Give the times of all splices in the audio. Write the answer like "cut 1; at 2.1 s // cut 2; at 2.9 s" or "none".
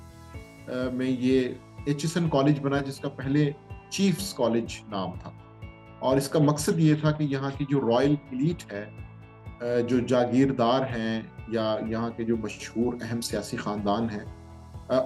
none